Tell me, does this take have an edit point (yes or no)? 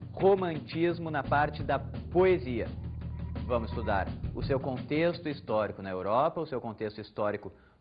yes